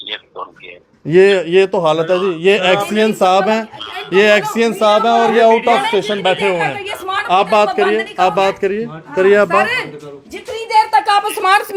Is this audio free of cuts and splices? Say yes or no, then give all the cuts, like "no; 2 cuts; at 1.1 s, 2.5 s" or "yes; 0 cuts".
yes; 0 cuts